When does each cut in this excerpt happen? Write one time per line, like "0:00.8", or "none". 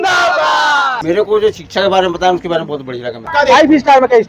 0:01.2
0:03.3